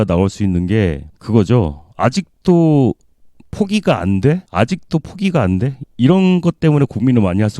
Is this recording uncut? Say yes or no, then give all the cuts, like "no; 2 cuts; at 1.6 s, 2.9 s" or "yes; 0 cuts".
yes; 0 cuts